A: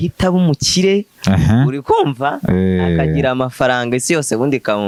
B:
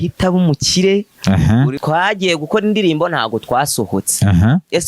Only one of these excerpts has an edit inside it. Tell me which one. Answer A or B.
B